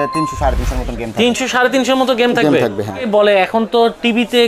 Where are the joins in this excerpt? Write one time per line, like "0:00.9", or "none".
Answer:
0:03.0